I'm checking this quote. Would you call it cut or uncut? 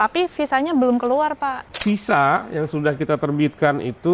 cut